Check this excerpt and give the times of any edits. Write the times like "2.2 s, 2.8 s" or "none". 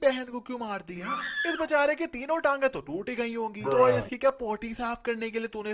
none